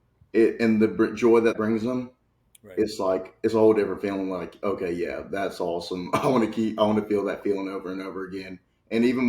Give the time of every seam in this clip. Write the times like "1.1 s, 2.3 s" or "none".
1.5 s